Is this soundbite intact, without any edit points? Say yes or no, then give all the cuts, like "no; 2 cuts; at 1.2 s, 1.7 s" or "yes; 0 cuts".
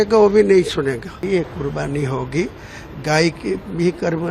no; 1 cut; at 1.2 s